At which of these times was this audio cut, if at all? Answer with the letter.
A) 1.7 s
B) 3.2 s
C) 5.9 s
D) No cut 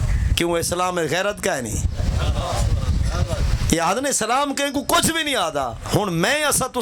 D